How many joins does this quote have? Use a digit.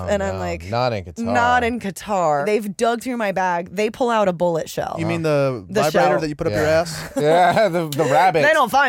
2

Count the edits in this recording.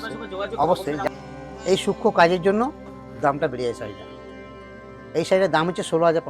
1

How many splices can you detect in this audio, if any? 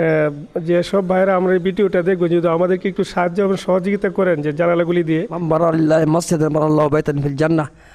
1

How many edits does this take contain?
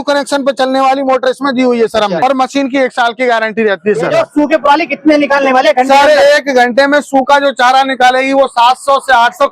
2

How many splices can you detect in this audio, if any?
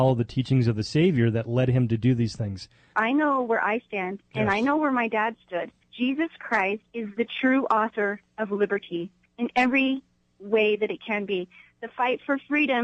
5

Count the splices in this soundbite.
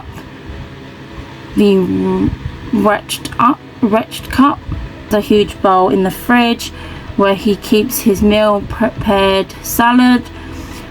1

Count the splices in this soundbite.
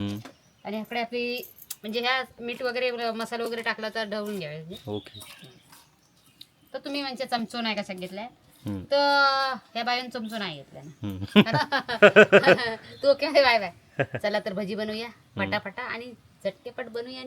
1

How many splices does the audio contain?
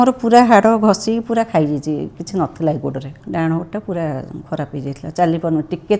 1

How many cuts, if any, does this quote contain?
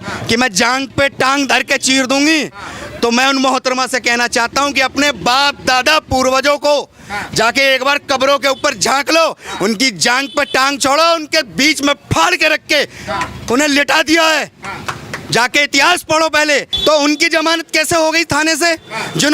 1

